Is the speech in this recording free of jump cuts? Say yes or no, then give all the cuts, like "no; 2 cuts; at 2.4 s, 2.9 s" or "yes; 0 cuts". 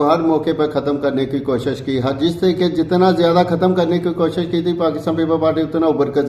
yes; 0 cuts